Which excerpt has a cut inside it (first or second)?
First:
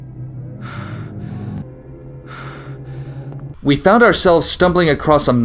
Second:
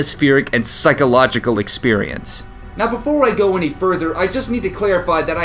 first